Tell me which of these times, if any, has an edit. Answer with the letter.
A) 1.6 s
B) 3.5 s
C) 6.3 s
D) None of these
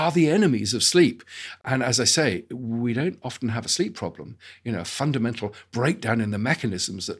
A